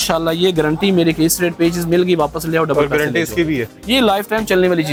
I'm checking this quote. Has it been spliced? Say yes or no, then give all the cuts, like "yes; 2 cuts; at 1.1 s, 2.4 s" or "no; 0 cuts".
no; 0 cuts